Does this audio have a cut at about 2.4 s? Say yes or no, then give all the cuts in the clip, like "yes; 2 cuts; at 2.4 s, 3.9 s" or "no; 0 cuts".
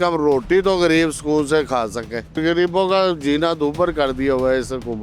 yes; 1 cut; at 2.4 s